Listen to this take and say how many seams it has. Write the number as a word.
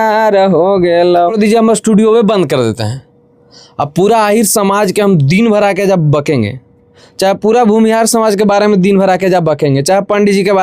one